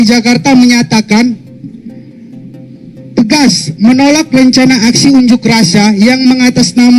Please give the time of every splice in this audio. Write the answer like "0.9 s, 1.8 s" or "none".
none

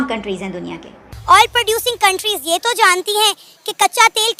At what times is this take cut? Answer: 1.1 s

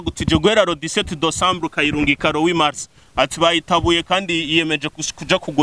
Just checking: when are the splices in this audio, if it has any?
none

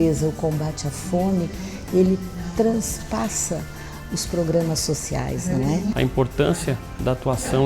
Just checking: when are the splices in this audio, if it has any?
6.0 s

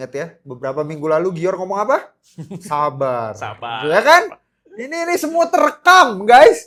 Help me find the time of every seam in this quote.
none

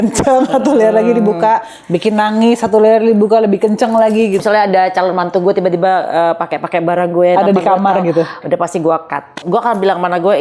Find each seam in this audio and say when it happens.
4.4 s, 9.4 s

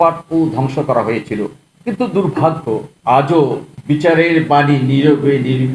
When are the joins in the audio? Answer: 1.7 s, 2.9 s, 3.7 s

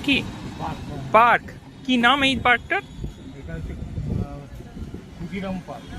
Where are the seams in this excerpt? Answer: none

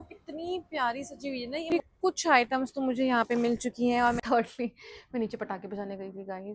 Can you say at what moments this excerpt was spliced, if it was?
1.6 s, 4.2 s

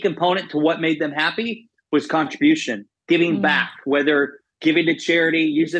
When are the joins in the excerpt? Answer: none

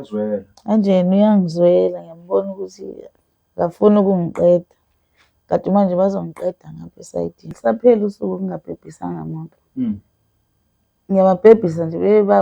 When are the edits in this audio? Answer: 7.5 s

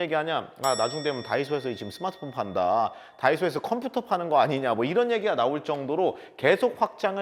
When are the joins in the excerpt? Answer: none

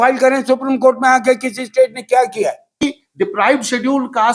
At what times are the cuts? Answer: 2.8 s

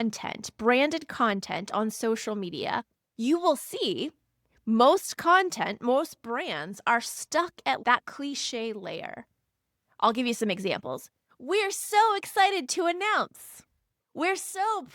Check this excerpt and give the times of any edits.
7.8 s

